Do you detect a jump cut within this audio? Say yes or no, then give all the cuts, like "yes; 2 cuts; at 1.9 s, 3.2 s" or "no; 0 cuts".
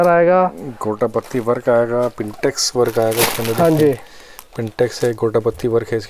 no; 0 cuts